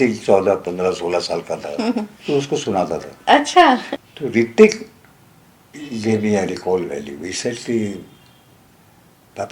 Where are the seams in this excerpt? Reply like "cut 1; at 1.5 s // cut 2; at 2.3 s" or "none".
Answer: cut 1; at 4.0 s